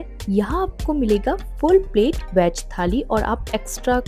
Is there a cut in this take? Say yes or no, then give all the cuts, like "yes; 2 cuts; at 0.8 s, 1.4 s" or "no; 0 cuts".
no; 0 cuts